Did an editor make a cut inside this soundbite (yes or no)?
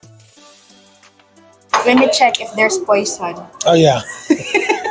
no